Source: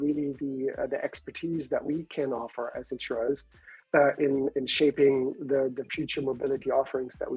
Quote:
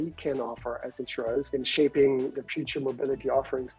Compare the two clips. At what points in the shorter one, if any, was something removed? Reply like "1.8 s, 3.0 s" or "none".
1.5 s, 2.4 s